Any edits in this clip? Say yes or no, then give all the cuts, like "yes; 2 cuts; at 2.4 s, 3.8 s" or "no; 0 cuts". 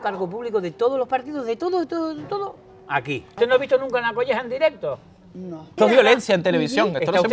yes; 2 cuts; at 3.3 s, 5.8 s